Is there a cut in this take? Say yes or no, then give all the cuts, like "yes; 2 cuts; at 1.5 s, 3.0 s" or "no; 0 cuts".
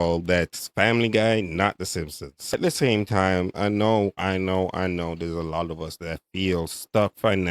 yes; 1 cut; at 2.5 s